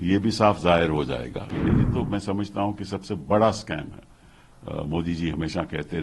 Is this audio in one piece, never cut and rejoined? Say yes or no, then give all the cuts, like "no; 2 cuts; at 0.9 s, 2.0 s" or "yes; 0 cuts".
no; 1 cut; at 1.5 s